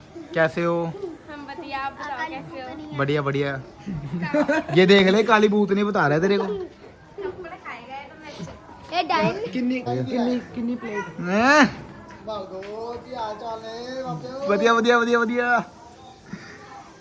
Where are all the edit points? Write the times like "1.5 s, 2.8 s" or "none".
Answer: none